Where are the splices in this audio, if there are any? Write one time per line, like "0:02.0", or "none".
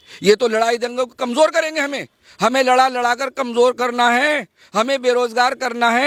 none